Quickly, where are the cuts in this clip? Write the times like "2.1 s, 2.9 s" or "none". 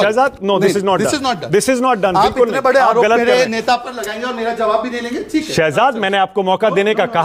none